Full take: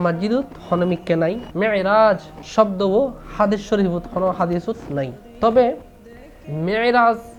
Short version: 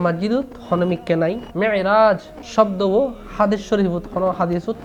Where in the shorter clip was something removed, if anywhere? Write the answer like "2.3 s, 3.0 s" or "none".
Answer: none